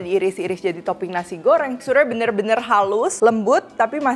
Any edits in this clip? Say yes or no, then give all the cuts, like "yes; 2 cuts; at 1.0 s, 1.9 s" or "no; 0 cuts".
yes; 2 cuts; at 1.8 s, 3.1 s